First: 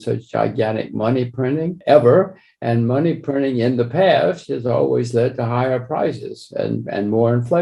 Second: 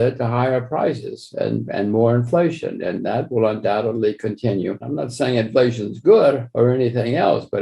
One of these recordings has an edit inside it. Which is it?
second; 1 cut; at 4.8 s

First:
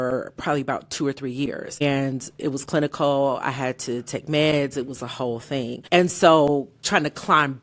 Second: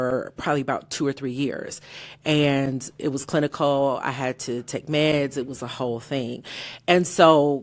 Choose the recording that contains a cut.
first; 2 cuts; at 1.8 s, 5.8 s

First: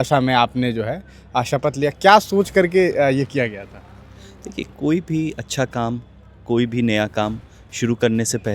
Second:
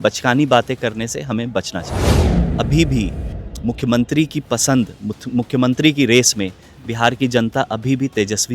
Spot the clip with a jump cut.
second; 1 cut; at 2.4 s

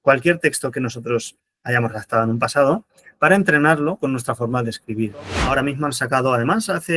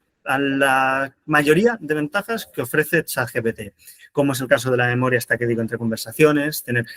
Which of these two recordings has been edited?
first; 1 cut; at 5.4 s

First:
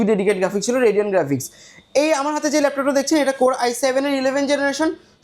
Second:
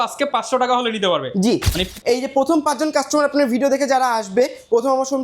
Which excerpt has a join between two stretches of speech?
second; 1 cut; at 1.8 s

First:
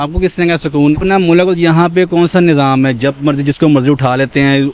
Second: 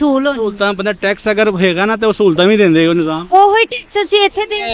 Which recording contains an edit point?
first; 1 cut; at 0.9 s

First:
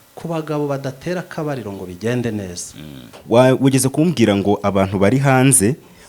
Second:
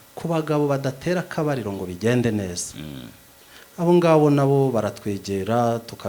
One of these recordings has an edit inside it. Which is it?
first; 1 cut; at 3.2 s

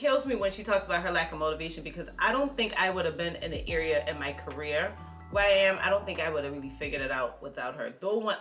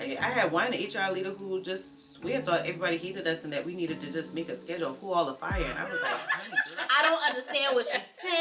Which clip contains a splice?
second; 1 cut; at 6.2 s

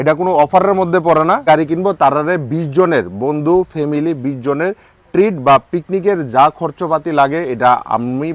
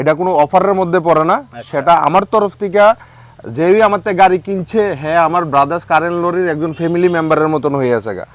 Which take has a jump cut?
first; 1 cut; at 1.4 s

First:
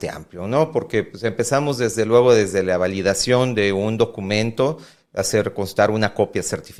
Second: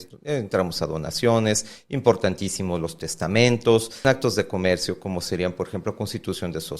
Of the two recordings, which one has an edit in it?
second; 1 cut; at 4.0 s

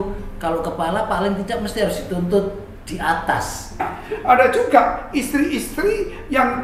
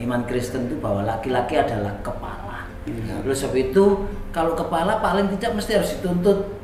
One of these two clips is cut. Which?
first; 1 cut; at 3.9 s

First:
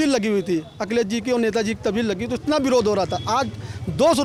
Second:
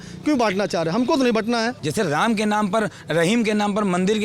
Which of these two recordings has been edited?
second; 1 cut; at 1.8 s

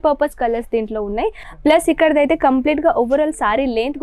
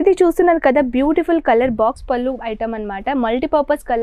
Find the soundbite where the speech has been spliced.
first; 1 cut; at 1.5 s

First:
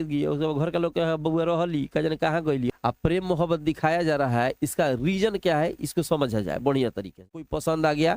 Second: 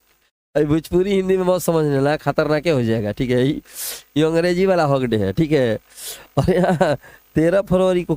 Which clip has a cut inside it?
first; 2 cuts; at 2.7 s, 7.2 s

